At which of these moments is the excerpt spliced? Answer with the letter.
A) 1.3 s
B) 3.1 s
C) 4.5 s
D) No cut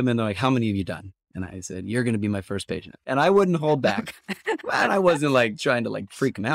B